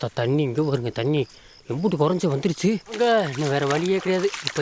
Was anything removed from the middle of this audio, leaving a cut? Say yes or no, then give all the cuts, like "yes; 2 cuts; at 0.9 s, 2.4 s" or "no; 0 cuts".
yes; 1 cut; at 2.9 s